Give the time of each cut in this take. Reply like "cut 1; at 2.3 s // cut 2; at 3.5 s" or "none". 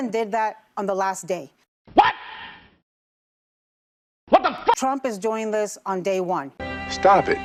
none